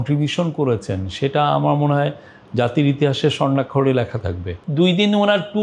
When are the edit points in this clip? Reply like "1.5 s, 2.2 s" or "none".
4.6 s